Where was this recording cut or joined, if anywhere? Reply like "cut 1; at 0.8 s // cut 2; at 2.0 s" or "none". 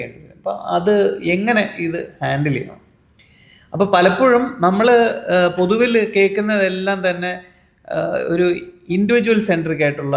none